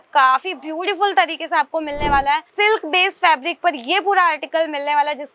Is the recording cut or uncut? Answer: cut